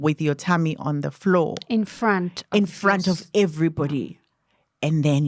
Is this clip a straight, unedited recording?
yes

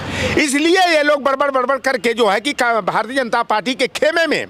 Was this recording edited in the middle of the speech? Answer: no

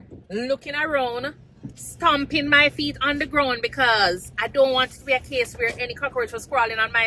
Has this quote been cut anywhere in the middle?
no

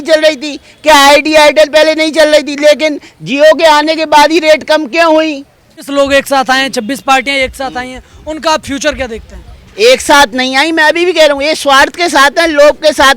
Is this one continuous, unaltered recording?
no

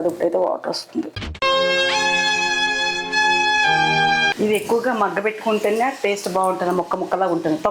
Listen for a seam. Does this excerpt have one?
yes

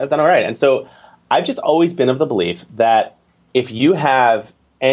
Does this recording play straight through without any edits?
yes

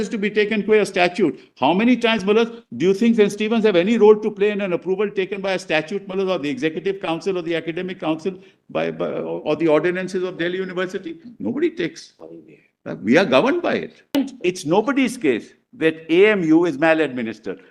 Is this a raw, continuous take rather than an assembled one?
no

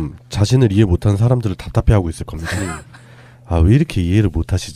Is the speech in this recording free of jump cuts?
yes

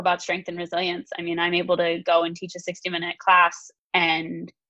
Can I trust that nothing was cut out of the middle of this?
yes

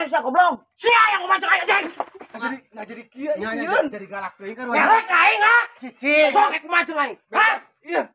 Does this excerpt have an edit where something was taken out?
yes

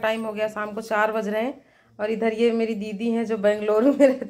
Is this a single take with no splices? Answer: yes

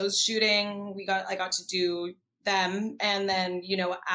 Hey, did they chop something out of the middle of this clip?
no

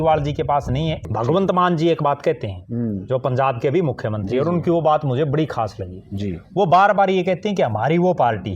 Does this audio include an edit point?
yes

